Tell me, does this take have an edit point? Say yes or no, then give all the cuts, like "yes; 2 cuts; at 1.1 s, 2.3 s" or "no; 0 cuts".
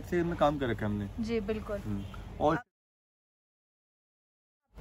no; 0 cuts